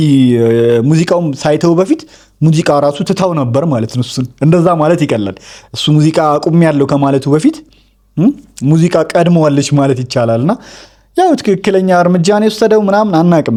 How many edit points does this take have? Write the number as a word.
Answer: zero